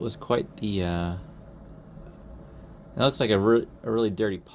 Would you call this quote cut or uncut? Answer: uncut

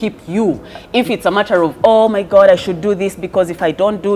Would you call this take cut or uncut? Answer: uncut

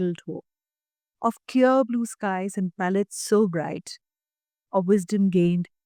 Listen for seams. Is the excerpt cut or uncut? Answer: uncut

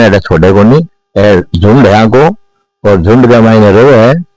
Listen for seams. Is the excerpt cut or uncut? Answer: uncut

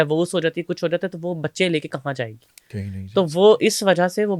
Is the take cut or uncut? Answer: uncut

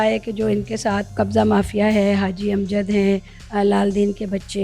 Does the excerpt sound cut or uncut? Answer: cut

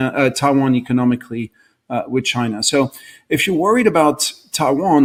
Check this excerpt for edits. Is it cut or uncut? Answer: uncut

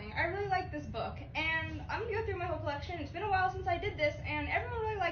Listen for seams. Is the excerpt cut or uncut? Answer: uncut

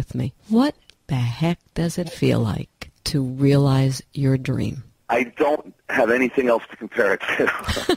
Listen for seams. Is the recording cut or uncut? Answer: uncut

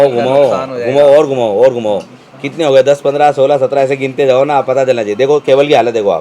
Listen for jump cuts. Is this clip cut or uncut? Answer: uncut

